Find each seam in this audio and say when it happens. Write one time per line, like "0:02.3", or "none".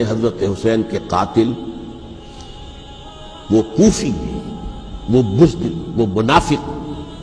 none